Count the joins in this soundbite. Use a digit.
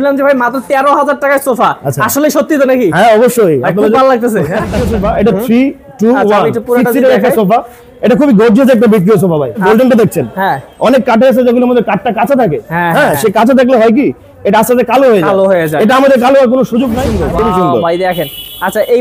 3